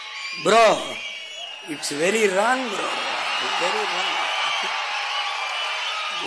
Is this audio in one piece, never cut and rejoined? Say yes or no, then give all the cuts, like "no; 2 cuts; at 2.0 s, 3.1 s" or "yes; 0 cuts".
yes; 0 cuts